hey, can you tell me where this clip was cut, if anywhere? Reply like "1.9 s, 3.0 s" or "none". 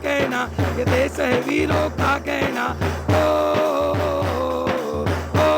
none